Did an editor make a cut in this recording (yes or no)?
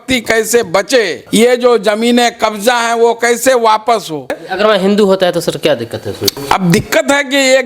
yes